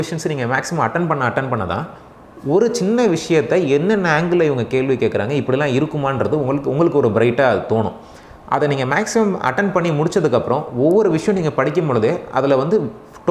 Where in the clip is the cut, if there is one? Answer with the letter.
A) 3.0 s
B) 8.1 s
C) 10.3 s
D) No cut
D